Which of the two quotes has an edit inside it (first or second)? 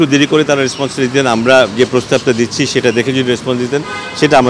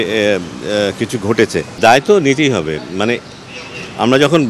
second